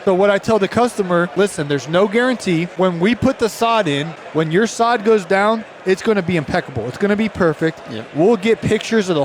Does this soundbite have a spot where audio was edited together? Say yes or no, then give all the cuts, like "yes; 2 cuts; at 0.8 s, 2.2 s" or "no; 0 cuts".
yes; 3 cuts; at 1.3 s, 2.7 s, 4.1 s